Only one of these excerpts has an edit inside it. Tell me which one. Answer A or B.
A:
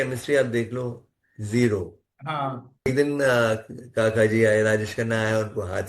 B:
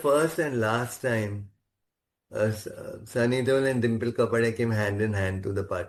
A